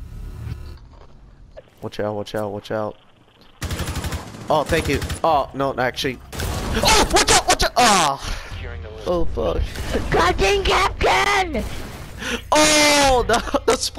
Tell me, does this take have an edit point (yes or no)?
yes